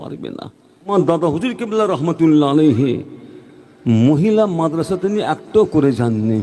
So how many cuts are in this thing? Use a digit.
1